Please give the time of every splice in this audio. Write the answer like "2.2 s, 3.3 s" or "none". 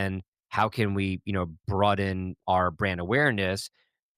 1.6 s, 2.4 s